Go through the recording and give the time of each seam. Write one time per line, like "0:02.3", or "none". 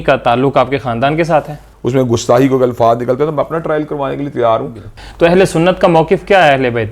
0:01.7
0:04.8